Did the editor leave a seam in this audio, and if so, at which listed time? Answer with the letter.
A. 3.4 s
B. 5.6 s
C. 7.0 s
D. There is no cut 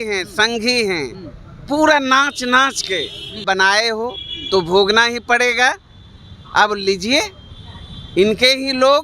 A